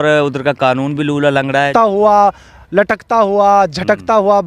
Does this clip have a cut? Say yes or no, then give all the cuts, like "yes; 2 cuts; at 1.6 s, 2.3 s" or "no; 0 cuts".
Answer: yes; 1 cut; at 1.7 s